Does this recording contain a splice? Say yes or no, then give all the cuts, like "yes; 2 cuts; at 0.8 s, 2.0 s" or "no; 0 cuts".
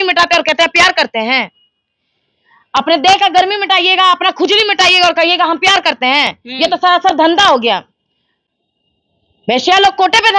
no; 0 cuts